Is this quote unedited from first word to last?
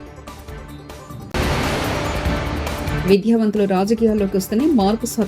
no; 2 cuts; at 1.2 s, 2.9 s

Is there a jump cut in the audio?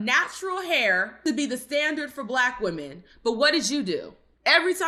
no; 0 cuts

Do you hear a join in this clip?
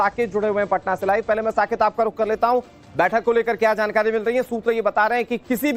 yes; 1 cut; at 4.3 s

